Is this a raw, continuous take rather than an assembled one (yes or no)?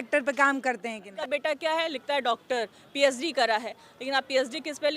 no